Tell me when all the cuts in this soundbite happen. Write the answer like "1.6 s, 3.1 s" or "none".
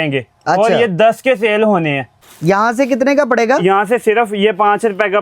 2.2 s